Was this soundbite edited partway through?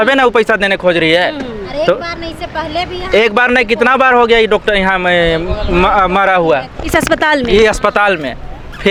no; 0 cuts

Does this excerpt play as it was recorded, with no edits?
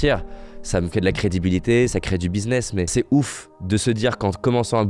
yes; 0 cuts

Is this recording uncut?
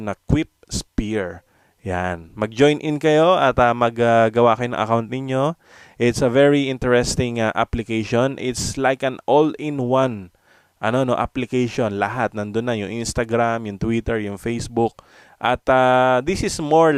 yes; 0 cuts

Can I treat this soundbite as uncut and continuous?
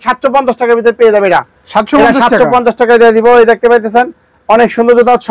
yes; 0 cuts

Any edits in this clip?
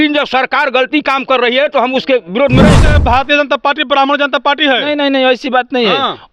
yes; 1 cut; at 2.8 s

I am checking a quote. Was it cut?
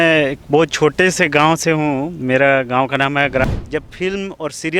yes; 1 cut; at 3.4 s

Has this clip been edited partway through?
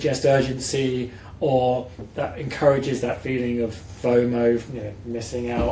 no; 0 cuts

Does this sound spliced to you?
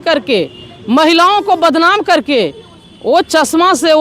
no; 0 cuts

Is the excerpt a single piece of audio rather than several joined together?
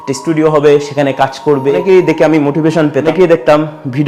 yes; 0 cuts

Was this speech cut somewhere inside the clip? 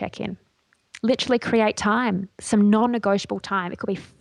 no; 0 cuts

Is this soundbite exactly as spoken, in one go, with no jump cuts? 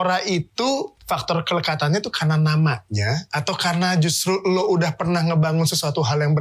no; 1 cut; at 1.0 s

